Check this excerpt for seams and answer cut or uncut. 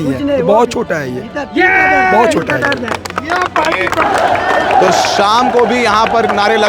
cut